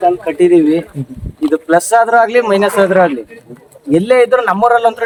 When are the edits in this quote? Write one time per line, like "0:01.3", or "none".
none